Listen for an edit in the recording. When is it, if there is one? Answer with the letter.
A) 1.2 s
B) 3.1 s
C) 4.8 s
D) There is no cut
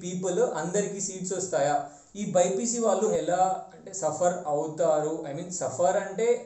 B